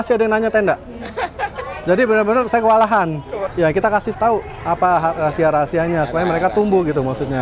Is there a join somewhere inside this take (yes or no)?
yes